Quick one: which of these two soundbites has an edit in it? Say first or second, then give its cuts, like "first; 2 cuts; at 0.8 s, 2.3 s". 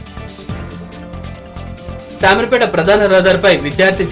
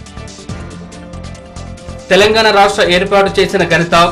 first; 1 cut; at 1.3 s